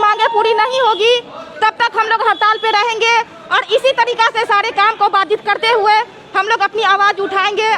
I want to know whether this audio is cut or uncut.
uncut